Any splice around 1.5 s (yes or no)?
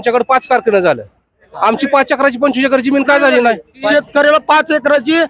no